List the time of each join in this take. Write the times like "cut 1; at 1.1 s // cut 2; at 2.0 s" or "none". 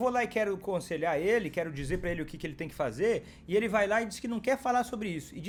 none